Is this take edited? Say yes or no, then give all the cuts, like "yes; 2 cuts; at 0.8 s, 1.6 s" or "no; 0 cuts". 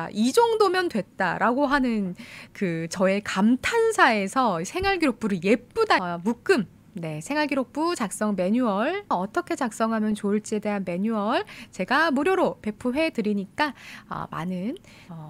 yes; 2 cuts; at 6.0 s, 9.1 s